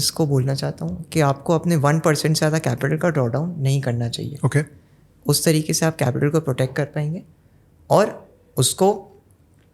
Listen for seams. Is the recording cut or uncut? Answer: uncut